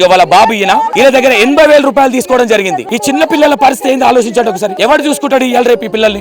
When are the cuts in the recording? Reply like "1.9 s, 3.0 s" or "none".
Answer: 0.9 s, 2.8 s, 4.7 s